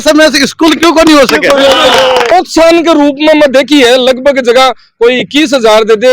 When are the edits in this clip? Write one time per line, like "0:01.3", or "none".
0:02.3

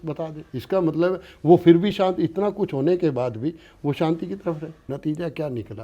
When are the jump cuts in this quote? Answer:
0:04.7

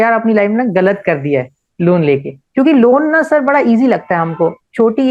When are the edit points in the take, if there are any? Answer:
0:02.4

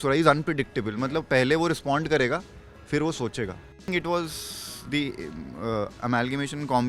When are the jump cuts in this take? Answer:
0:03.9

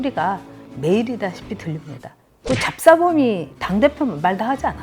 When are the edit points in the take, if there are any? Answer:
0:02.3
0:03.5

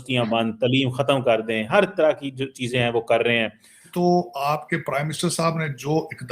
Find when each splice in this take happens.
0:03.9

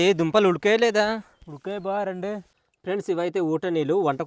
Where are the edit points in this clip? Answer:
none

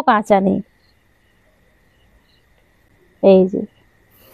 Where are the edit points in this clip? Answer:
0:03.3

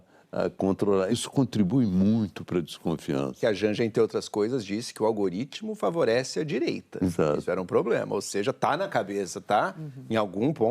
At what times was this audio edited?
0:01.1
0:03.4

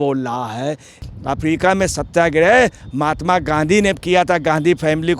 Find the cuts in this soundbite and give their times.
0:01.0

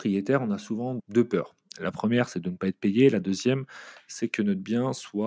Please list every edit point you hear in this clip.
0:01.0

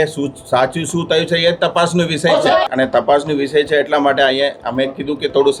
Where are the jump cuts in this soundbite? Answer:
0:02.7

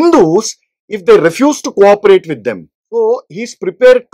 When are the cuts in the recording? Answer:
0:02.7

